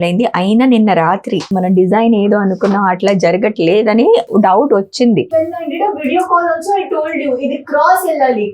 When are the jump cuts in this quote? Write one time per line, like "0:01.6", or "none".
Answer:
0:01.5
0:05.3